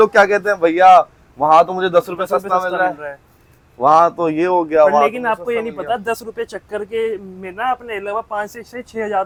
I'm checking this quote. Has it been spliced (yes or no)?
no